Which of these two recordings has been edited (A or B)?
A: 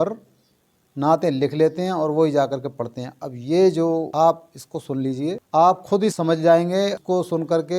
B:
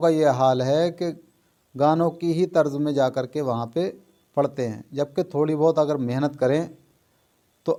A